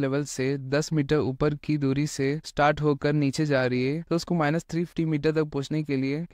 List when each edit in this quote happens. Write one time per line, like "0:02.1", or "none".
none